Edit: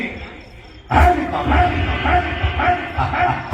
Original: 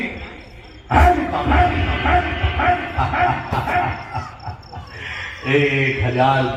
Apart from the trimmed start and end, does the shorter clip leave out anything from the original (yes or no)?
no